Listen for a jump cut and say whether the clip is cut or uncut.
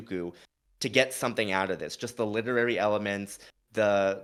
uncut